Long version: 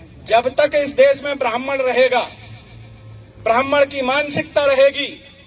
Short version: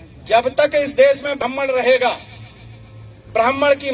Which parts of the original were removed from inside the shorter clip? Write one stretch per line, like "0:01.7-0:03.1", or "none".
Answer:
0:01.4-0:01.5